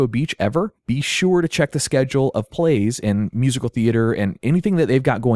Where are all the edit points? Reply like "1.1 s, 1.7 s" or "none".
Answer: 3.5 s